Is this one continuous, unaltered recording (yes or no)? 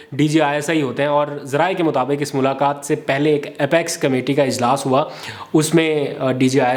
yes